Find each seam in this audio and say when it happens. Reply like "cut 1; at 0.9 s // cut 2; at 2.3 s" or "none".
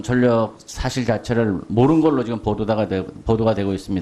cut 1; at 2.1 s